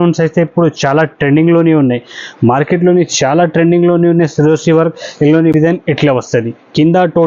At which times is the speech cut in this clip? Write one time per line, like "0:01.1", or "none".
0:05.5